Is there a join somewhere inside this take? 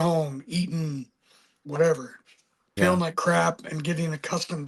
no; 0 cuts

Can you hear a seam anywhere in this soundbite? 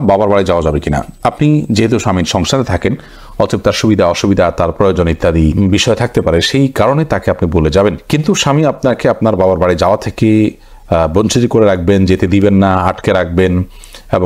no; 0 cuts

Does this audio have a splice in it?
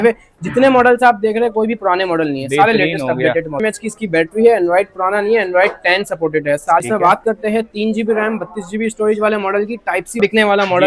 yes; 3 cuts; at 3.6 s, 6.8 s, 10.2 s

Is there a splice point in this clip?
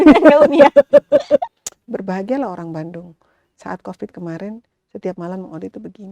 yes; 1 cut; at 1.6 s

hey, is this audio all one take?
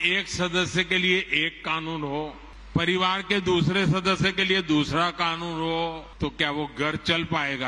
no; 2 cuts; at 2.5 s, 6.1 s

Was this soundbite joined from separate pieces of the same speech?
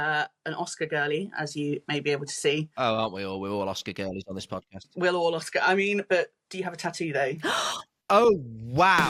no; 0 cuts

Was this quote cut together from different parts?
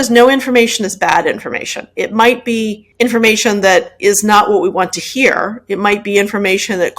yes; 1 cut; at 2.8 s

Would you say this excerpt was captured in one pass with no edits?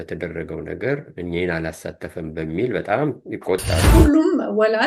no; 1 cut; at 3.8 s

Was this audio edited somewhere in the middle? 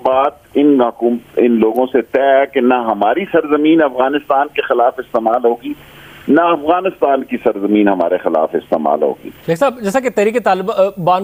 no; 0 cuts

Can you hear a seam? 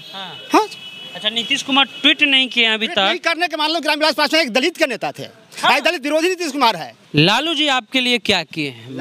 yes; 1 cut; at 6.9 s

